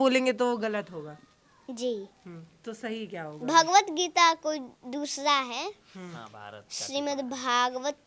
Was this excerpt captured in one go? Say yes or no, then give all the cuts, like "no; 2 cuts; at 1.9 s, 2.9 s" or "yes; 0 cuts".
yes; 0 cuts